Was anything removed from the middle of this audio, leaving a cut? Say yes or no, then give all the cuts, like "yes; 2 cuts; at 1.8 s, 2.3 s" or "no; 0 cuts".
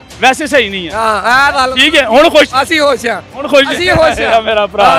no; 0 cuts